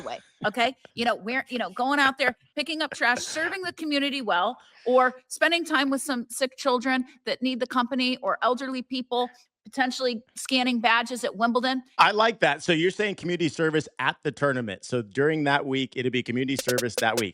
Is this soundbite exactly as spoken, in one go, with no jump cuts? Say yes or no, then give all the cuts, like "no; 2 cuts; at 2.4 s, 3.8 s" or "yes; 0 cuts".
no; 1 cut; at 11.9 s